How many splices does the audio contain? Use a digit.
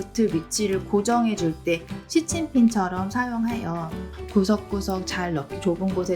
1